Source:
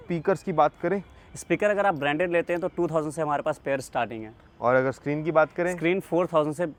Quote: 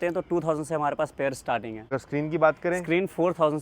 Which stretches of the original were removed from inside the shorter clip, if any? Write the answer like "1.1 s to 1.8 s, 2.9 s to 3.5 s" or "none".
4.4 s to 4.8 s